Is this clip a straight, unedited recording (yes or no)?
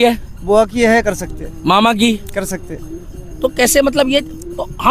yes